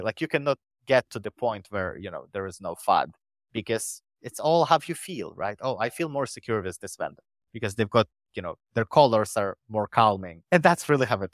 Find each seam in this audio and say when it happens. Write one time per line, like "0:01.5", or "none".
0:10.3